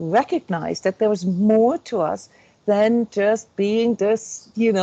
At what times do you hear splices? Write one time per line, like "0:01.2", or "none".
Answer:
none